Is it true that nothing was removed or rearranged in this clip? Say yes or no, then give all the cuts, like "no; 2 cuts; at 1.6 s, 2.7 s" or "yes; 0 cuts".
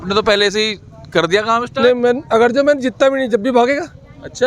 yes; 0 cuts